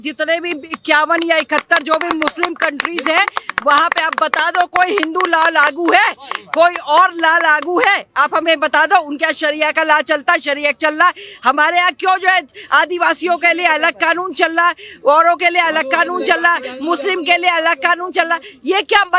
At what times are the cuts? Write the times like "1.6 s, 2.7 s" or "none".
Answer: none